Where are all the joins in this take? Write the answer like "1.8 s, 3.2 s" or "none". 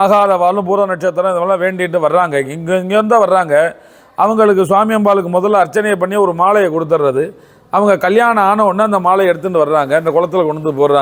none